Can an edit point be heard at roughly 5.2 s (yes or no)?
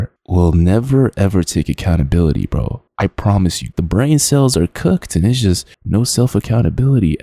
no